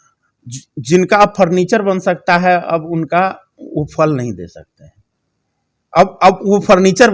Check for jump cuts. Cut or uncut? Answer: uncut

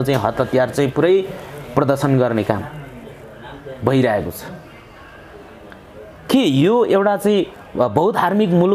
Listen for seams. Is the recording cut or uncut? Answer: uncut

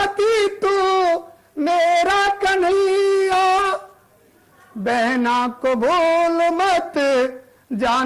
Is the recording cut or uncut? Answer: uncut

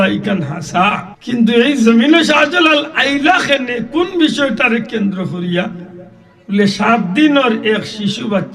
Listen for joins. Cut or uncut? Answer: cut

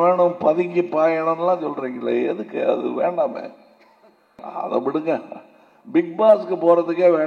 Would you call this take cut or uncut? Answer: cut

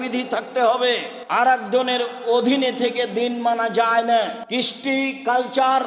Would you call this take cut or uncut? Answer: cut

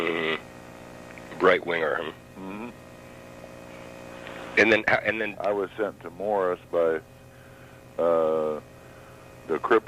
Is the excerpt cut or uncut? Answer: cut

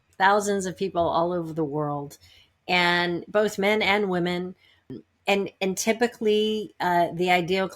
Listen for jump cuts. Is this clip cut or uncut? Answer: cut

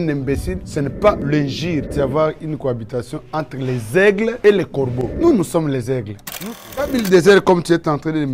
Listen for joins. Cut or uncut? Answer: cut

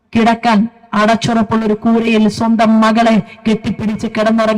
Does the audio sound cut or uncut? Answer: uncut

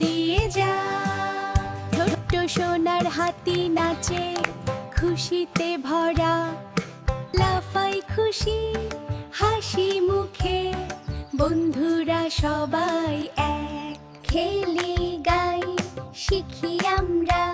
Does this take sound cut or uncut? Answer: cut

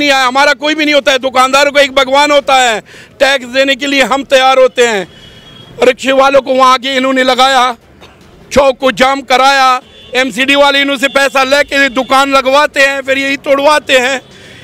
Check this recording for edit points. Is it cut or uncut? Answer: uncut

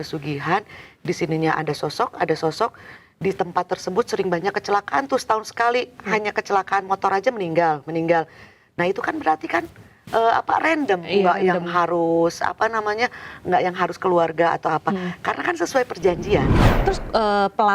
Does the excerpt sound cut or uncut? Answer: cut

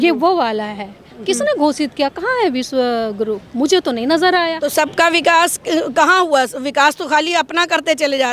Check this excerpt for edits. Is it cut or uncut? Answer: cut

